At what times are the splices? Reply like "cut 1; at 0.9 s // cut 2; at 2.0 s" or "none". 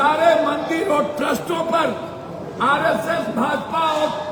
none